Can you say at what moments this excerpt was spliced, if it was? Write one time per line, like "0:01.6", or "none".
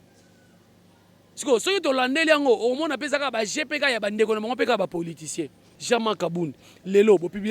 0:05.7